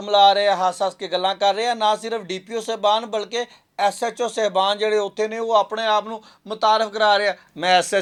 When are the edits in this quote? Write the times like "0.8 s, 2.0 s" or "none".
none